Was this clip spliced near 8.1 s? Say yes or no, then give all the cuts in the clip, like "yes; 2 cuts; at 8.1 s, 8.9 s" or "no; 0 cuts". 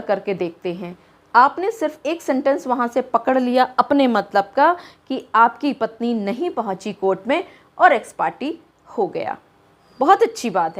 no; 1 cut; at 9.8 s